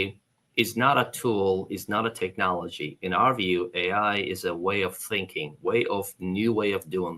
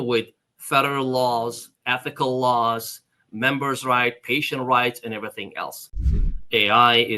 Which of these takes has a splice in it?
second; 1 cut; at 6.0 s

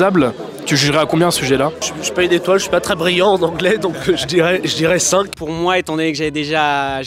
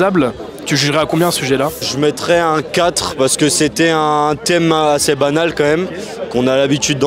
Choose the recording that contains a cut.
first; 2 cuts; at 1.8 s, 5.3 s

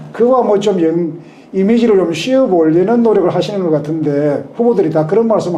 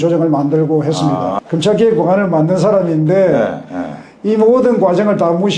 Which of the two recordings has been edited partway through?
second; 1 cut; at 1.4 s

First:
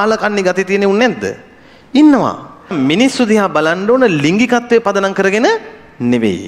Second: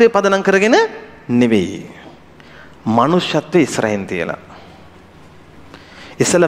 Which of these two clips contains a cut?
first; 1 cut; at 2.7 s

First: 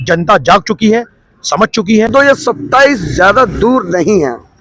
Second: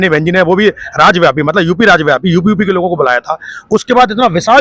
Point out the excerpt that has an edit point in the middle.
first; 1 cut; at 2.1 s

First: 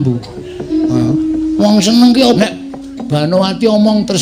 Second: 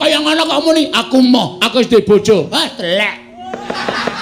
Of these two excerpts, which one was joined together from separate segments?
first; 1 cut; at 2.4 s

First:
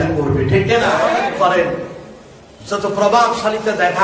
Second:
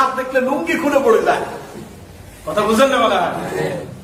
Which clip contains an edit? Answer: first; 1 cut; at 1.2 s

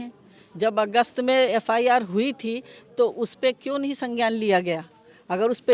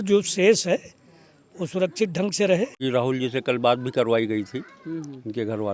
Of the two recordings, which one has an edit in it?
second; 1 cut; at 2.8 s

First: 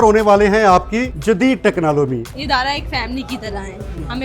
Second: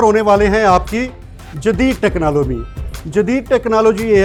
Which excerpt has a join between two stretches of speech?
first; 2 cuts; at 1.1 s, 2.3 s

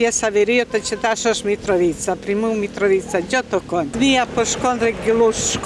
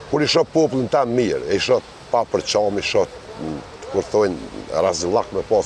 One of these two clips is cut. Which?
first; 1 cut; at 3.9 s

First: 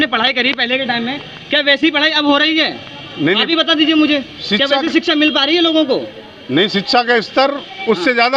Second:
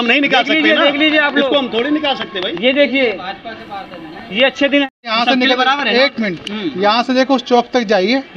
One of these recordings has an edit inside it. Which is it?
second; 1 cut; at 5.0 s

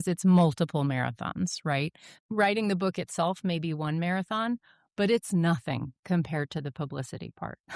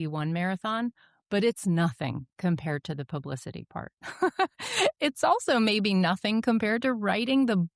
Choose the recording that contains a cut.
first; 1 cut; at 2.2 s

